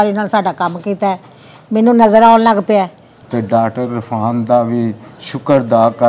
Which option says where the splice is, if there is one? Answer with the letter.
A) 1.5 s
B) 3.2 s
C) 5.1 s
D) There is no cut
B